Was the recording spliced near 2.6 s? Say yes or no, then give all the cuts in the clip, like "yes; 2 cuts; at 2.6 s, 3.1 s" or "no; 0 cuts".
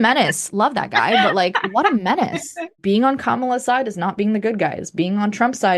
yes; 1 cut; at 2.6 s